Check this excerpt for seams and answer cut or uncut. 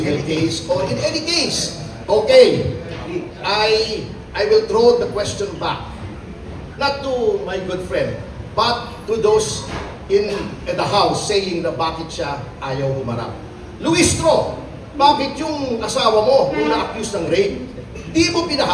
uncut